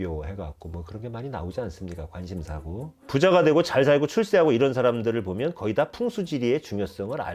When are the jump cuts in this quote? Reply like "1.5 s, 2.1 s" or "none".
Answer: 3.0 s